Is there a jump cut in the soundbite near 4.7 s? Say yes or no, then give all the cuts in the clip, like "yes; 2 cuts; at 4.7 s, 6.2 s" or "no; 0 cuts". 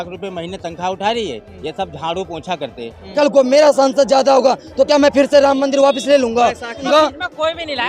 no; 2 cuts; at 3.0 s, 6.7 s